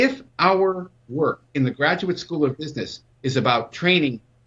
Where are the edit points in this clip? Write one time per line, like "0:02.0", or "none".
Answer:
0:01.4